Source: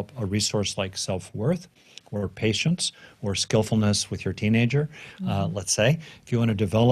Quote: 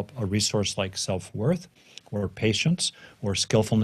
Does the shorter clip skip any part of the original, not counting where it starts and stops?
no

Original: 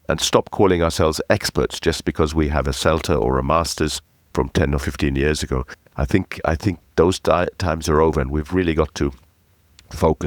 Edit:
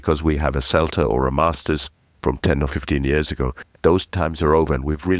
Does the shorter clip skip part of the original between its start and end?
yes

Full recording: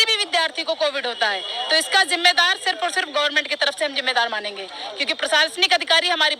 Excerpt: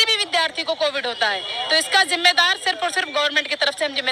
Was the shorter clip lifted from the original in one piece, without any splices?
yes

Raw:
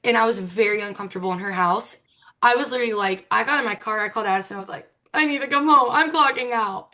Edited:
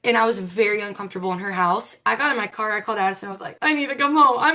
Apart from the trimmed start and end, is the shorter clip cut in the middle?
yes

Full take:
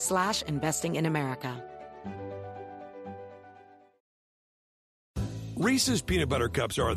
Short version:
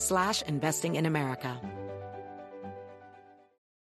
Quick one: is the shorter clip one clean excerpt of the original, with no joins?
no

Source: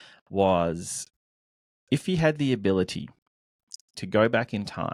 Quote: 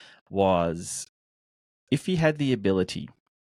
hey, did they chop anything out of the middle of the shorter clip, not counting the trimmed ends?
no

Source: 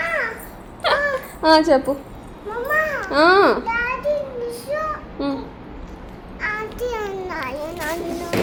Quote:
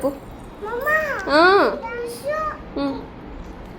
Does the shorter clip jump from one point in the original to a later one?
yes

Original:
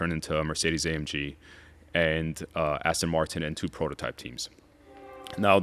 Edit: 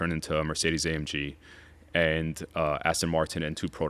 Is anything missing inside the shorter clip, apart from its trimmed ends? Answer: no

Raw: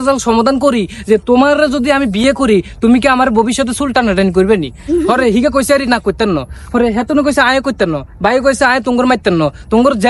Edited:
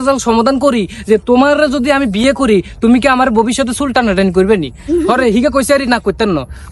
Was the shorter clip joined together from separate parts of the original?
no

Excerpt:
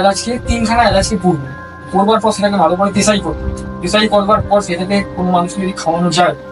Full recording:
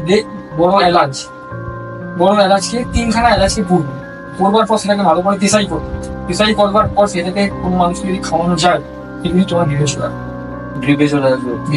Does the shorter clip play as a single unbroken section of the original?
yes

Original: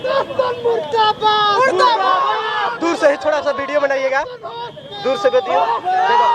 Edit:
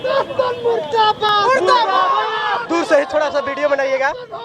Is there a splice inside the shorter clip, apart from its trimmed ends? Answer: yes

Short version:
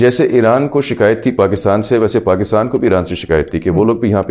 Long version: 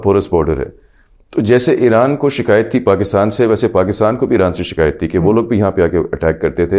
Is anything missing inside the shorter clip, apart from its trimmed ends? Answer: no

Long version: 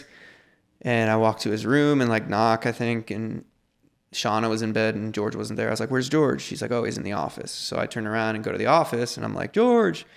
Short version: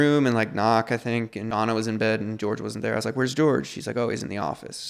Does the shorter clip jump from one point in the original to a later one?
yes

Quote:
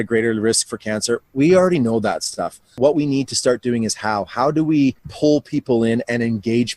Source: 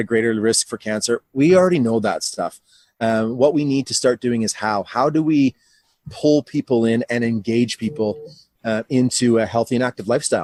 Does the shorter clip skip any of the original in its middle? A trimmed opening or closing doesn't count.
yes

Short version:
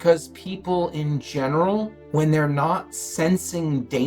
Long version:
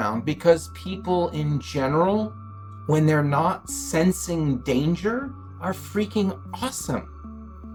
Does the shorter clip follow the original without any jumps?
no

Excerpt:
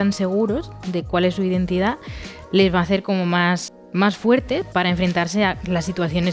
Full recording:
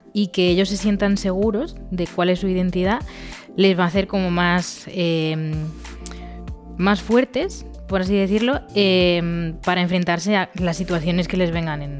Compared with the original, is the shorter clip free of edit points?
no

